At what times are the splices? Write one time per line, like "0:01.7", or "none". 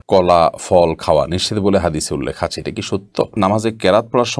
0:03.4

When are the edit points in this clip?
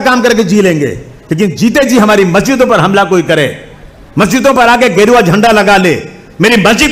none

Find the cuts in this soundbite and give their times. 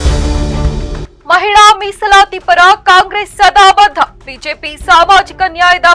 0:01.1

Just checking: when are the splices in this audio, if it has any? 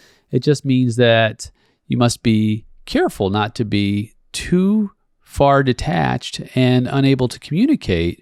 none

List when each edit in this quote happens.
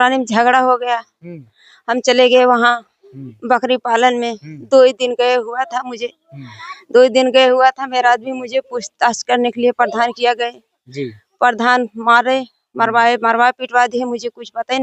none

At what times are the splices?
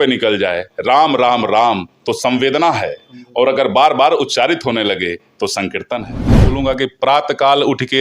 0:06.5

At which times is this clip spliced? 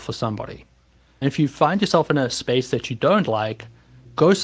0:01.0

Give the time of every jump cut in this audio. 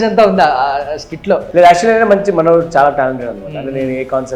0:01.5

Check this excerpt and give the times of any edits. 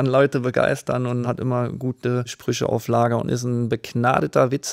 0:01.2
0:02.4

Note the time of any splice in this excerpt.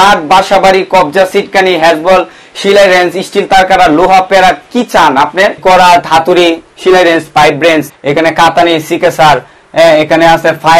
0:05.6
0:07.9

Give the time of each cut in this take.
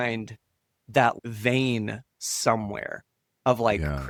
none

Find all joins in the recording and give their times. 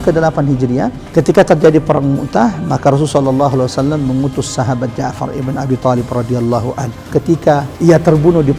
0:01.0
0:07.7

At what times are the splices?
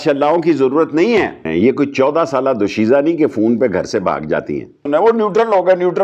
0:01.4
0:04.8

